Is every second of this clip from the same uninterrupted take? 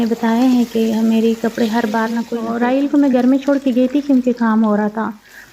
no; 1 cut; at 2.3 s

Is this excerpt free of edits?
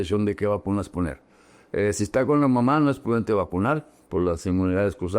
yes; 0 cuts

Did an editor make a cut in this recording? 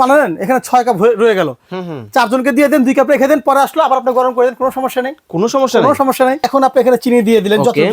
yes; 1 cut; at 6.4 s

